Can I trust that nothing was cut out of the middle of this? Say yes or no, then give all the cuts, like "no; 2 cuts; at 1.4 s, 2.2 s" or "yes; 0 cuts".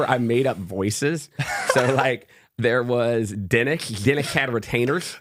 yes; 0 cuts